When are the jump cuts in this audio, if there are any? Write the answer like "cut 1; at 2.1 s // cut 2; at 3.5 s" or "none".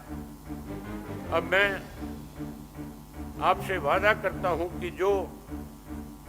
cut 1; at 5.3 s